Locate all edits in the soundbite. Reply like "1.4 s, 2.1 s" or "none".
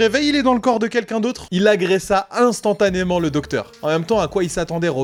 none